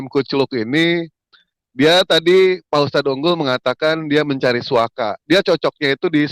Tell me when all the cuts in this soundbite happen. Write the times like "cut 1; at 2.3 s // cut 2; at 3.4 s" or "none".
none